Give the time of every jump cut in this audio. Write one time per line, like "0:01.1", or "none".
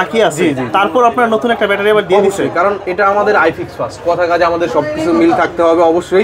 none